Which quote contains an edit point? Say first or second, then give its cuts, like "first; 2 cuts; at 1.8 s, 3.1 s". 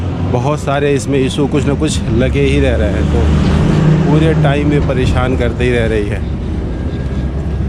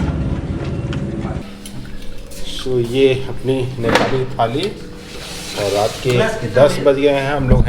second; 1 cut; at 1.4 s